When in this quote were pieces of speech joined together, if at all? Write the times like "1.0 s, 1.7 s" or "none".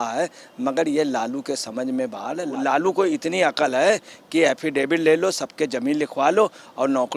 2.5 s